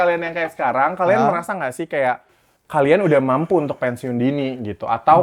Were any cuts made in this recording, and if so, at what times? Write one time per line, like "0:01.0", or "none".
none